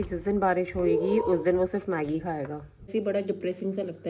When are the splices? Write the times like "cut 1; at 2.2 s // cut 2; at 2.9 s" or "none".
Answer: cut 1; at 2.9 s